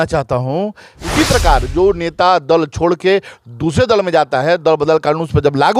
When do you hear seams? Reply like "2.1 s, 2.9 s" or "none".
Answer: 1.0 s